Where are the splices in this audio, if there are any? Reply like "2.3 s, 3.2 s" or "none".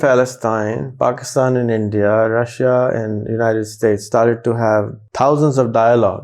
5.0 s